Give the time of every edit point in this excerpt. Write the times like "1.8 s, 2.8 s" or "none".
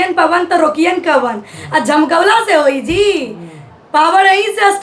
none